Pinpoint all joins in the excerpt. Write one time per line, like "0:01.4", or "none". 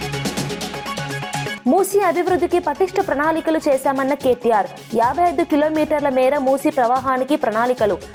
none

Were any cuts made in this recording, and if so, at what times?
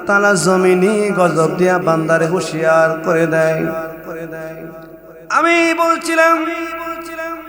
none

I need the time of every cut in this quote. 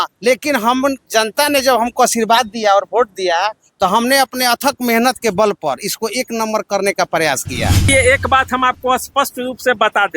0:07.8

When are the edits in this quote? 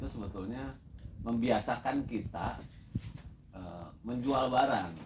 none

